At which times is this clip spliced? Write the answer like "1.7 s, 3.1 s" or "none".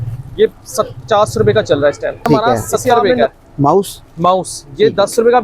3.1 s